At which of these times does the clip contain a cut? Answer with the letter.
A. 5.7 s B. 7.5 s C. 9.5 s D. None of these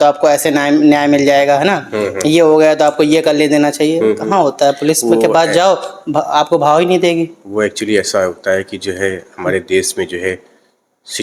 D